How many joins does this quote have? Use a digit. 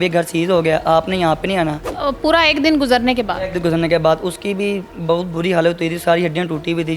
1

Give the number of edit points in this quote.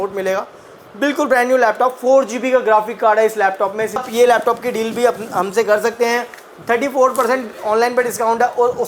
1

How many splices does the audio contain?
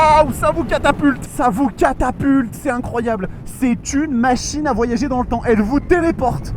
1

